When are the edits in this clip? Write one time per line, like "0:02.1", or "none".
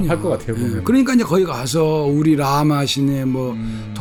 none